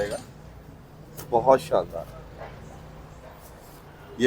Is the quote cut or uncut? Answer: uncut